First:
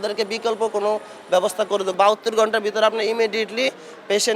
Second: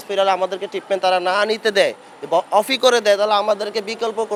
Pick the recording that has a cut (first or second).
first